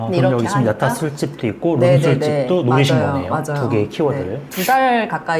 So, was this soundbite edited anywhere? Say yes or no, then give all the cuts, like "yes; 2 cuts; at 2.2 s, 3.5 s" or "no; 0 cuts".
yes; 1 cut; at 4.5 s